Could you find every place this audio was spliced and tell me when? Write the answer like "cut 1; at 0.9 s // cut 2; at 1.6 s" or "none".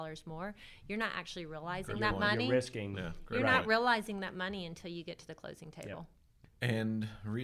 cut 1; at 6.2 s